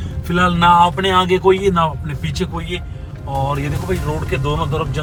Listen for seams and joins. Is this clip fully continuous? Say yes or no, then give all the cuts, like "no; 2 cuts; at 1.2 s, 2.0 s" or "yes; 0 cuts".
yes; 0 cuts